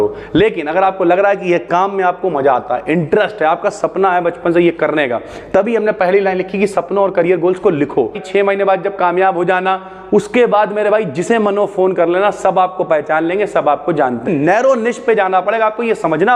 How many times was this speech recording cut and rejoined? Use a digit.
2